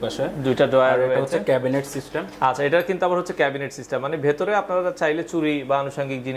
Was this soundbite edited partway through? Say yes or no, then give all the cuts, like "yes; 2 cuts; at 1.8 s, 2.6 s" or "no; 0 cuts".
no; 0 cuts